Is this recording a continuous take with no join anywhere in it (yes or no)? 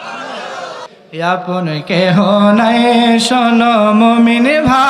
no